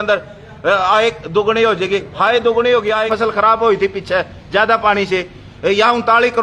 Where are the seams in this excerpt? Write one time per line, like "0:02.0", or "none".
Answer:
0:03.1